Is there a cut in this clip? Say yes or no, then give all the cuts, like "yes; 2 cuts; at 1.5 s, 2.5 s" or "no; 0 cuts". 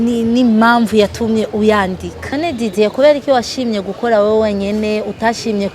yes; 1 cut; at 2.3 s